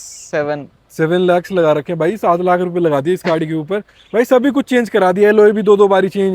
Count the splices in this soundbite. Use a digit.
0